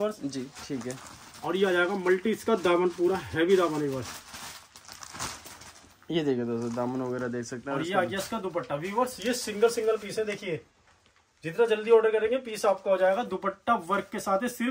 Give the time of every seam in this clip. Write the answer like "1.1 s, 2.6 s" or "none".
none